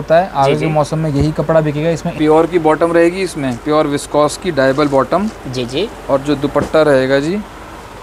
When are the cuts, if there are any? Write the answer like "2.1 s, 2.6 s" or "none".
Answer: 2.1 s